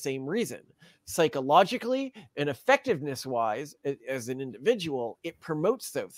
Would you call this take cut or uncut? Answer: uncut